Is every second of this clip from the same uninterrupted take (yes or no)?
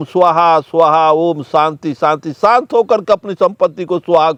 yes